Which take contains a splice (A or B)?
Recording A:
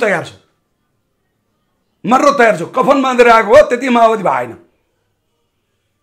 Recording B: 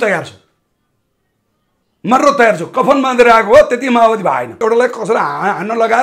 B